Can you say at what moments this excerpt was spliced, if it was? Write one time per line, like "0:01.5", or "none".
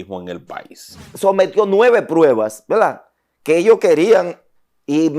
0:01.0